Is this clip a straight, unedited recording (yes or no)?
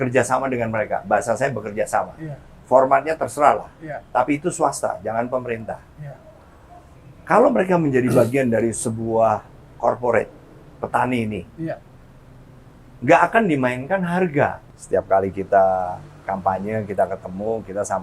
no